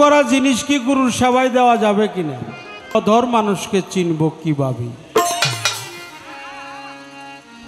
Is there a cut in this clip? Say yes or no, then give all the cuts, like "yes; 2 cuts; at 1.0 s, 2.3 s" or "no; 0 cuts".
yes; 1 cut; at 3.0 s